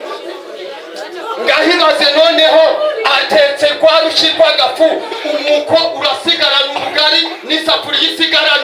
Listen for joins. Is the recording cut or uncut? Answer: uncut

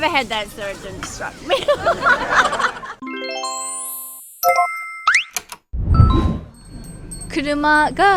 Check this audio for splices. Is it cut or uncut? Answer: uncut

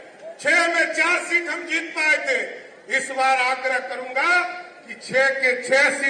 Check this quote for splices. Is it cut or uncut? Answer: uncut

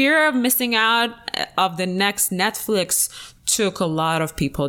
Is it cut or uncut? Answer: uncut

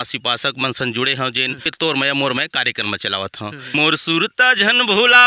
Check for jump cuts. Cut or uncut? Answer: cut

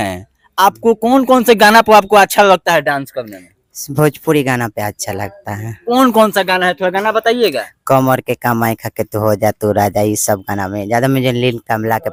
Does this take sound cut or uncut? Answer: uncut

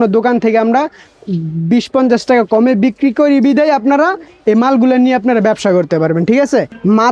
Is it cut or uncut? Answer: uncut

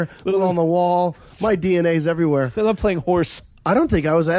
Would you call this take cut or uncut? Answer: uncut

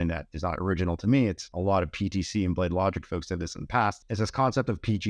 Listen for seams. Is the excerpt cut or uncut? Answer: cut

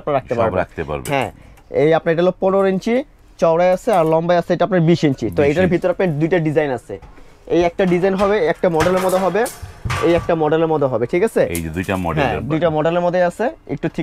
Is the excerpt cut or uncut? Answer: uncut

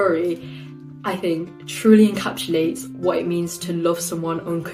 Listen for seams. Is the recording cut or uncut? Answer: uncut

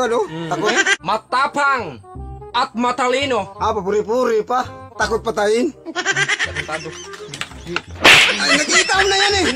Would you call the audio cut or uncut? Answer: cut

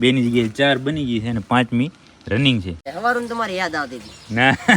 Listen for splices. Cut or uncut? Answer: cut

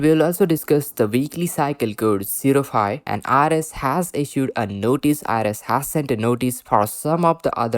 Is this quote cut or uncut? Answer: cut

